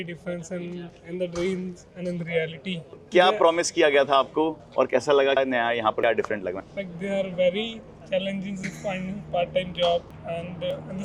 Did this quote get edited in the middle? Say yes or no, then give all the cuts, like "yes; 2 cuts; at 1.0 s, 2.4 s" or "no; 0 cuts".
no; 0 cuts